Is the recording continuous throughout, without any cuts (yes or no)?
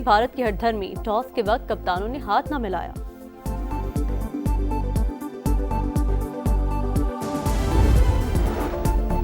no